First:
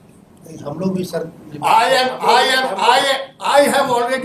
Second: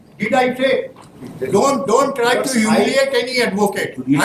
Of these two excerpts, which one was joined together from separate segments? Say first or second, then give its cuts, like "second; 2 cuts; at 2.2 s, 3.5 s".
second; 1 cut; at 1.2 s